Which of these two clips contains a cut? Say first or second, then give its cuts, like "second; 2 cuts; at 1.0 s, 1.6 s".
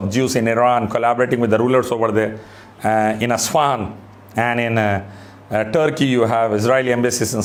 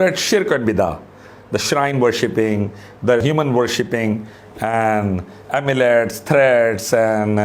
second; 1 cut; at 3.2 s